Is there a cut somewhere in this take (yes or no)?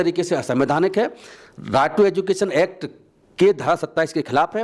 no